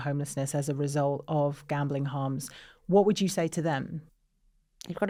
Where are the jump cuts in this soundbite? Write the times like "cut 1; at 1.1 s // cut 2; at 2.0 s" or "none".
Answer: none